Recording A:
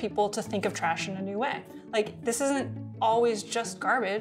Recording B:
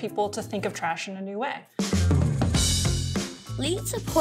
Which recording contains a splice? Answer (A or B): B